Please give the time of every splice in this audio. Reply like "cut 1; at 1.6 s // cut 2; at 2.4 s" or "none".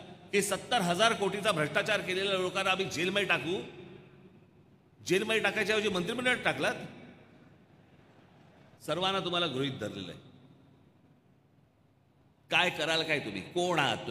cut 1; at 8.8 s